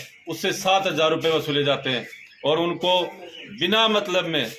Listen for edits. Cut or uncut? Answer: uncut